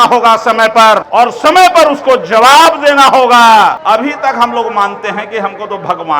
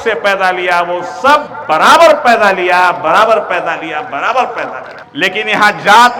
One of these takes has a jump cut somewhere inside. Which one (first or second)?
first